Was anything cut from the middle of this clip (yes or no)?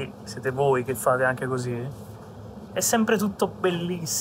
no